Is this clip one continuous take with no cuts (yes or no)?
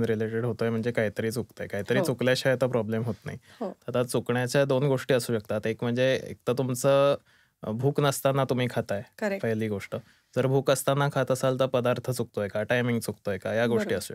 yes